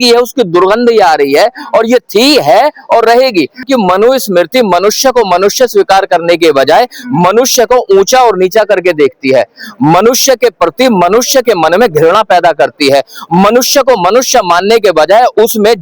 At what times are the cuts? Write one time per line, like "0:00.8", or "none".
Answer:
0:03.7